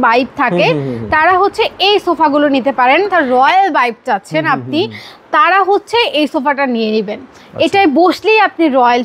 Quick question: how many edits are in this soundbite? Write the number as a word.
one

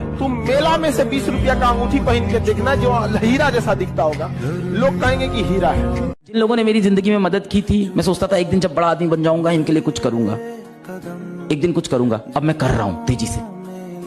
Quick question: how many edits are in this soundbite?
one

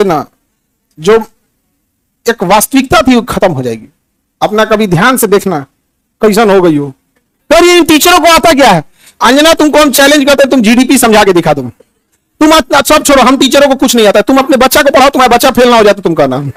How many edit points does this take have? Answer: zero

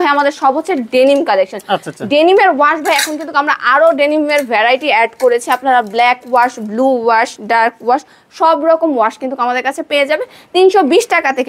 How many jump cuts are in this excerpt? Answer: zero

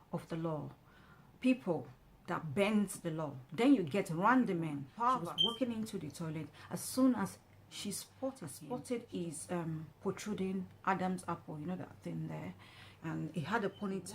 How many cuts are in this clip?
two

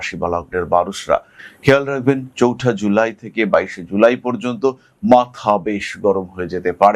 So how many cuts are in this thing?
one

